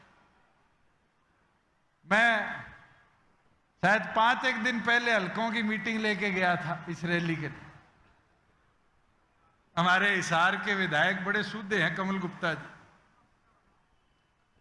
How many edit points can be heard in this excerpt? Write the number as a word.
zero